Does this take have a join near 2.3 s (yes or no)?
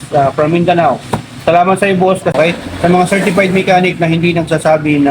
yes